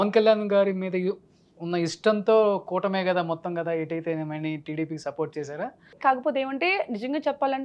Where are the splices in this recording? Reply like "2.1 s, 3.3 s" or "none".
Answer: 5.9 s